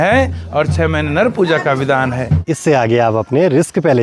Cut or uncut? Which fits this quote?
cut